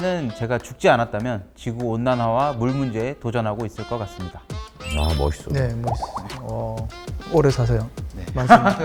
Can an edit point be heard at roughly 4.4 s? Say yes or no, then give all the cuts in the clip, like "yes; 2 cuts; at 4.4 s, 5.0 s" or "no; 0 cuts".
no; 0 cuts